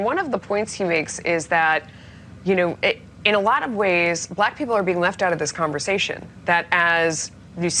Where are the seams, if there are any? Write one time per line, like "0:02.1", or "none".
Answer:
none